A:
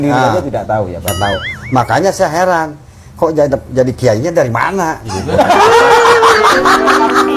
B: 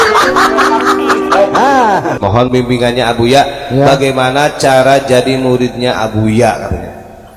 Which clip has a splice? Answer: B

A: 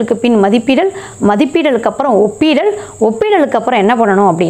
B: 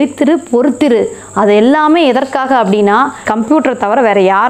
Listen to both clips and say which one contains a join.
B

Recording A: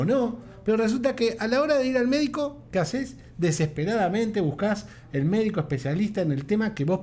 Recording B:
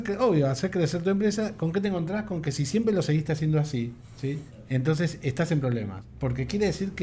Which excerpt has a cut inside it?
B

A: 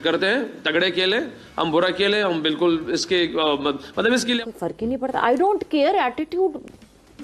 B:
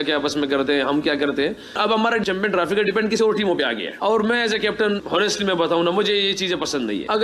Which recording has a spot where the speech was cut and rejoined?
A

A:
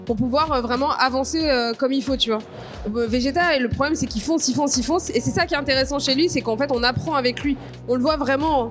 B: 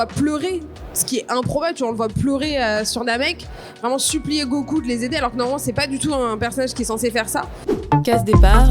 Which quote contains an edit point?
B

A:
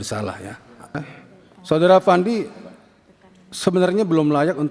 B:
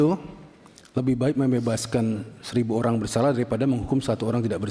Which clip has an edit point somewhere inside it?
A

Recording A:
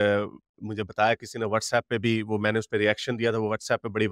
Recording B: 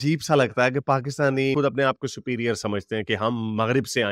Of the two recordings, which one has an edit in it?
B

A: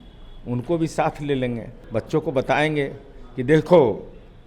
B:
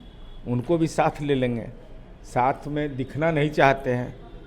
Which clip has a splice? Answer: A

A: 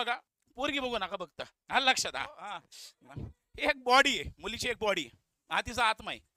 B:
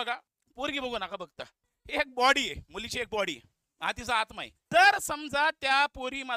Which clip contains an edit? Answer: B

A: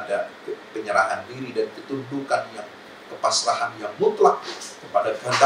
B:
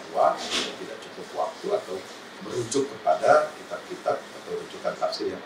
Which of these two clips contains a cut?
B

